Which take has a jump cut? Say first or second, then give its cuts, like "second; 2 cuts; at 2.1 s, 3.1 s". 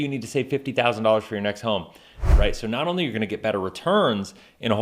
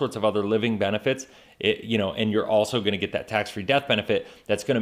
first; 1 cut; at 2.2 s